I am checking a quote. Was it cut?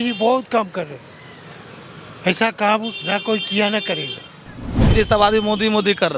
yes; 1 cut; at 4.9 s

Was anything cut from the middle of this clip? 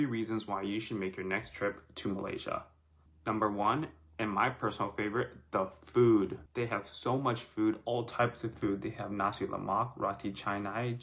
no; 0 cuts

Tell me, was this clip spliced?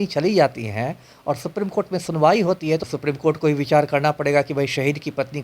yes; 1 cut; at 2.9 s

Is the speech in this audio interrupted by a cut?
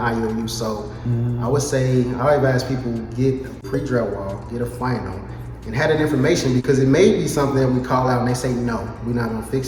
no; 0 cuts

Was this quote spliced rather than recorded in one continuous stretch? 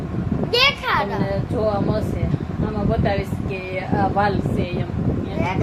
no; 0 cuts

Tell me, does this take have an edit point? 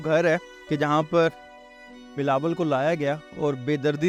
no; 0 cuts

